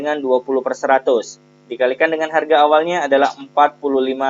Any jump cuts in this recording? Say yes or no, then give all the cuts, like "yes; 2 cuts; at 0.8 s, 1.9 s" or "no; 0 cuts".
no; 0 cuts